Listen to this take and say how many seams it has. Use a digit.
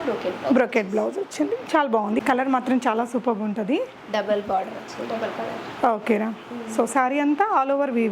1